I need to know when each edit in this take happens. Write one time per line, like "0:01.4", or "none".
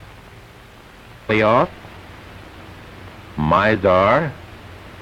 none

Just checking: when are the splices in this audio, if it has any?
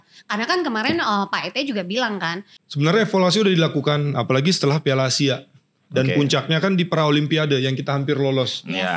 0:02.6

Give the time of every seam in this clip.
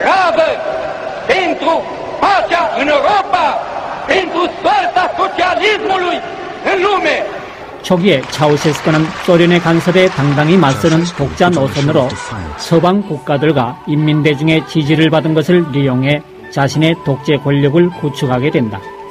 0:04.8

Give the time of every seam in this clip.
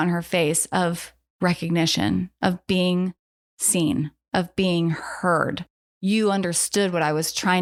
none

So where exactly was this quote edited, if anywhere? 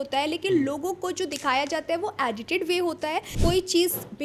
0:03.3

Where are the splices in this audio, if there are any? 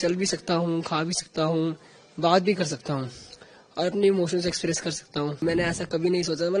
0:05.4

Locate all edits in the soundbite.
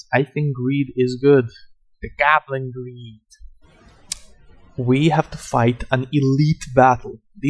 0:03.6

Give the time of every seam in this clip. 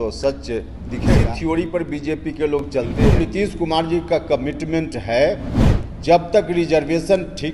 0:01.1
0:03.0

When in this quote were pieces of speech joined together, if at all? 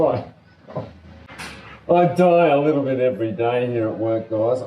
0:01.3

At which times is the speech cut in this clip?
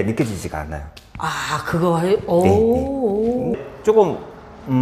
0:03.6

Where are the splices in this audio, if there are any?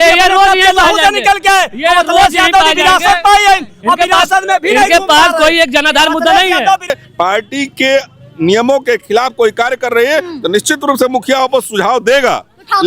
0:06.9

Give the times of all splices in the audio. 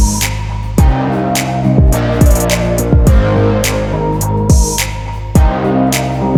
none

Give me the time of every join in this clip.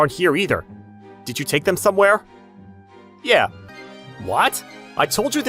0:03.6

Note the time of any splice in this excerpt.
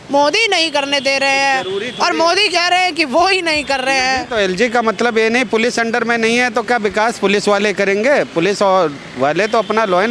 none

